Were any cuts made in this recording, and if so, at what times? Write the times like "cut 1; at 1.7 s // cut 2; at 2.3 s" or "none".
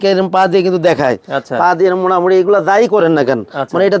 none